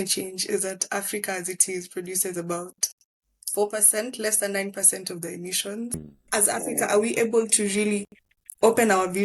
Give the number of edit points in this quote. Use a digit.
1